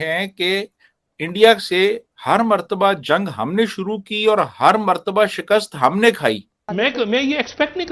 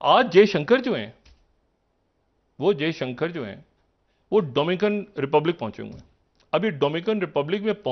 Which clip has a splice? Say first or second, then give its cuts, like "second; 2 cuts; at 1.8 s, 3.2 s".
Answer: first; 1 cut; at 6.6 s